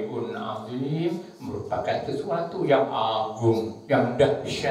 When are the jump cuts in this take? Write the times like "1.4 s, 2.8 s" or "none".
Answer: 3.8 s

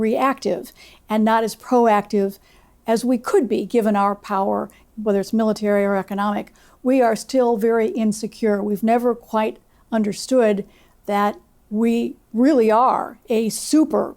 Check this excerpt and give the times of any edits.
4.8 s

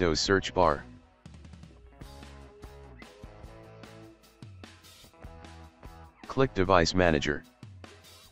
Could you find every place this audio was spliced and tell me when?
0.8 s, 6.3 s, 7.4 s

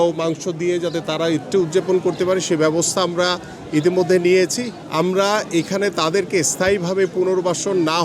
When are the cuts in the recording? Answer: 4.8 s

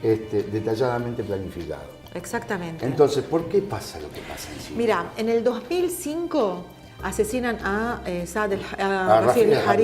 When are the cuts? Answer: 5.3 s

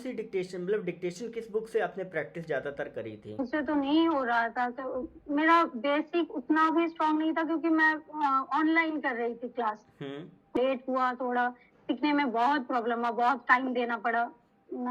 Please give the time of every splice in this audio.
3.4 s, 10.6 s

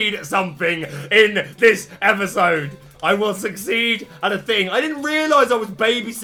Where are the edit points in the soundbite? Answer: none

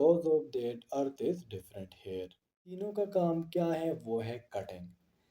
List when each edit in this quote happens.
2.7 s

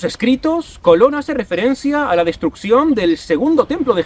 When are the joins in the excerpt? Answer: none

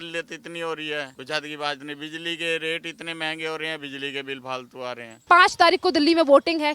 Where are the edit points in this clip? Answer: 1.2 s, 5.2 s

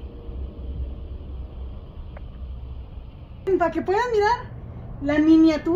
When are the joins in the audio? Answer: 3.5 s

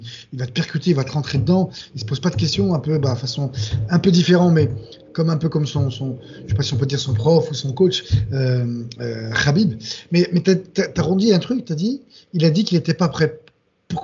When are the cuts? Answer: none

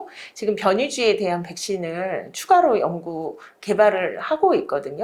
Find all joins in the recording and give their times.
none

